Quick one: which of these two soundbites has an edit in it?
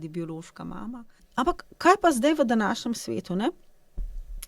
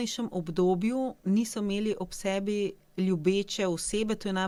first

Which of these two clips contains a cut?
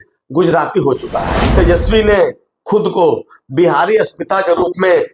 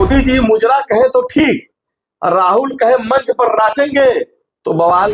first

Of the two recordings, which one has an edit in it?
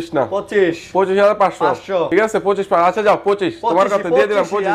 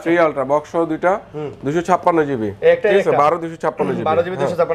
first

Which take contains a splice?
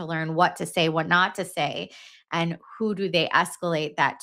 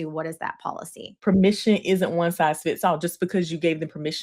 second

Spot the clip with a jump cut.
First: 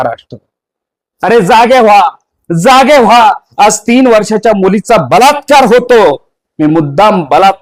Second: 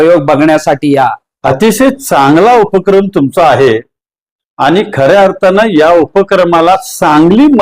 second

